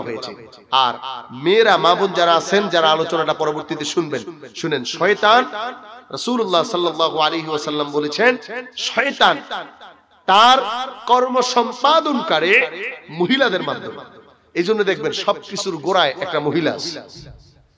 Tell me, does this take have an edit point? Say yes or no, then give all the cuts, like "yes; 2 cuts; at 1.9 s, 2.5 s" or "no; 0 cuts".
no; 0 cuts